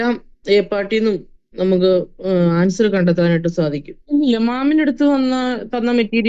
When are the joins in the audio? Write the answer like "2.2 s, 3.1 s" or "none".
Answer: 3.9 s